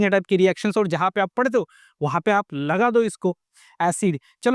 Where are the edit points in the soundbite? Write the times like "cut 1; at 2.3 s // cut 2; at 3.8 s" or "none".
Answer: cut 1; at 3.5 s